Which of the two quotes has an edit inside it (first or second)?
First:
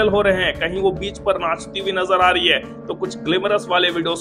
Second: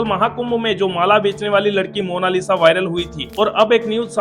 second